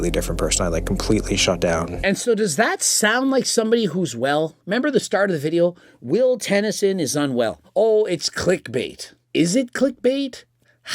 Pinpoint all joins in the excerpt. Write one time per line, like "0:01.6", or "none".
0:01.9
0:07.6